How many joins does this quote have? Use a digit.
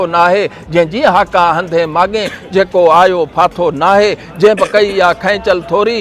0